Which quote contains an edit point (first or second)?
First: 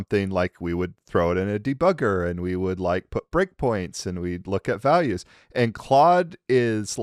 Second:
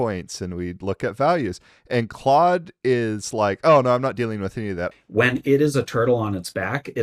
second